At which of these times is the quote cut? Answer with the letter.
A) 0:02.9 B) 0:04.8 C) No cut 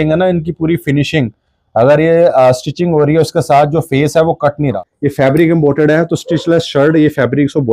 B